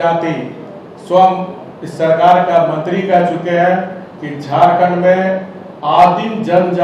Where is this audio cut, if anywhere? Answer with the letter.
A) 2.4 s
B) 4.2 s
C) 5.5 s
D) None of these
D